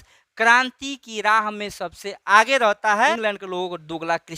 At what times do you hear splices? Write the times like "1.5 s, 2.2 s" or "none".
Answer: 3.1 s